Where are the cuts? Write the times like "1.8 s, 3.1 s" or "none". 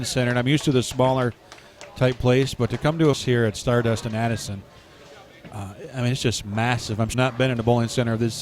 3.2 s, 7.1 s